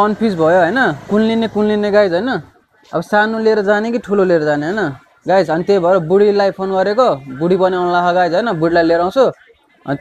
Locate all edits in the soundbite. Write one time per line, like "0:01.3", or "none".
none